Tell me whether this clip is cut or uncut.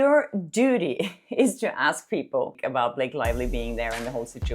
cut